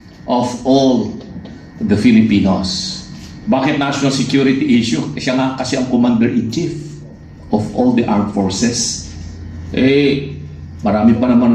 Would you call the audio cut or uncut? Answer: uncut